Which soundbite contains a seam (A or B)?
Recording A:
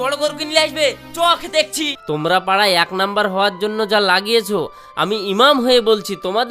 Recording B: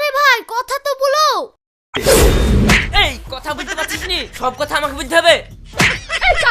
A